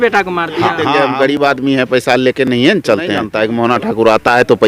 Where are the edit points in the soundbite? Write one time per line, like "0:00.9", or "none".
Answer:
0:00.9
0:03.3